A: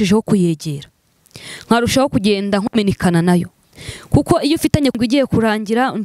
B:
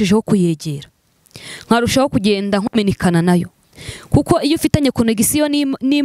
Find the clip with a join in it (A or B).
A